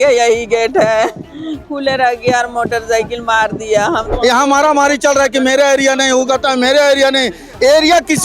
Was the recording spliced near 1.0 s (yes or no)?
no